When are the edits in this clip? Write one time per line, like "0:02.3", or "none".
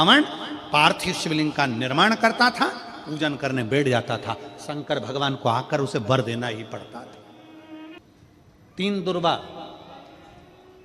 0:08.0